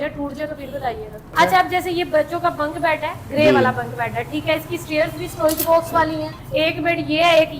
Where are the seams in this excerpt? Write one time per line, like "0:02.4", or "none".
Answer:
0:01.3
0:06.4

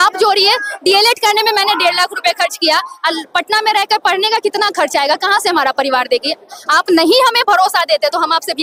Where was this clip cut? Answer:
none

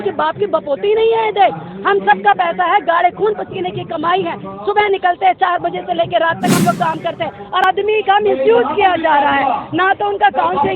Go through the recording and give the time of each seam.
0:07.6

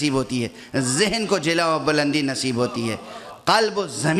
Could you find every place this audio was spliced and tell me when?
none

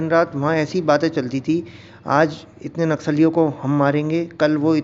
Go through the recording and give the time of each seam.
none

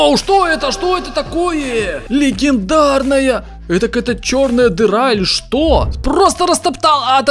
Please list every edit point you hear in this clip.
0:05.9

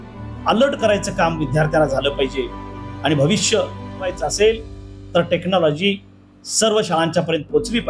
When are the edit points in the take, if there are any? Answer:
0:04.2

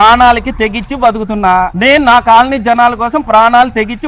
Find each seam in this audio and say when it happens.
0:01.7

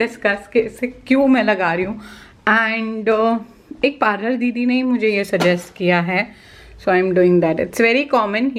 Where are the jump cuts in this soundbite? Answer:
none

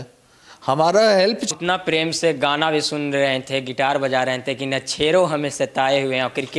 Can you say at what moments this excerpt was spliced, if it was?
0:01.4

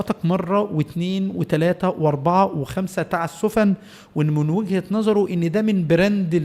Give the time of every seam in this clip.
none

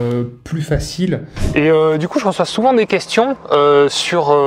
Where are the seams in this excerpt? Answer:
0:01.3

